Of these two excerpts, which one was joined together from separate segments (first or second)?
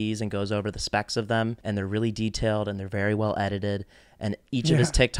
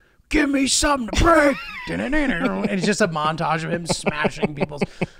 first